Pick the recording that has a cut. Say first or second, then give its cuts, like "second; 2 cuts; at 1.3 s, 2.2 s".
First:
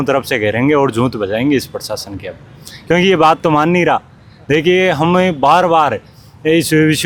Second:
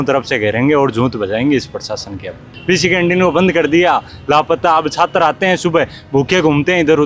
second; 1 cut; at 2.5 s